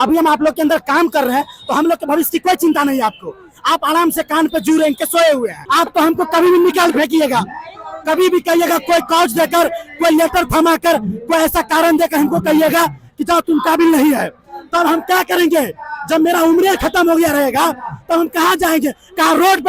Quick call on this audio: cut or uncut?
cut